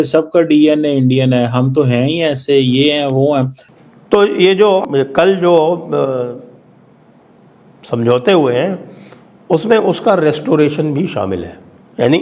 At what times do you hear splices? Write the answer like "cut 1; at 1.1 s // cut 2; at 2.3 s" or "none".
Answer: cut 1; at 3.6 s // cut 2; at 4.8 s